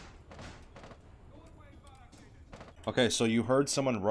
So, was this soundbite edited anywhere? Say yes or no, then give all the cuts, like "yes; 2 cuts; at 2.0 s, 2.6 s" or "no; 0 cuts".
no; 0 cuts